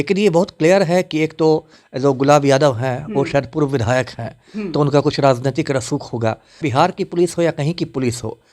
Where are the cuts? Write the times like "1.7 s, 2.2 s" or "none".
6.7 s